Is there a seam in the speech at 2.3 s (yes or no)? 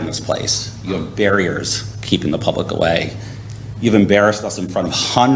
no